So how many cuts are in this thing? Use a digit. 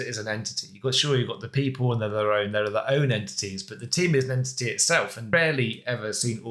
1